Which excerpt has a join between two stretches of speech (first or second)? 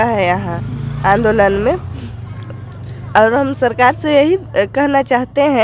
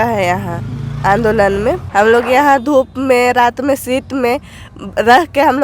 second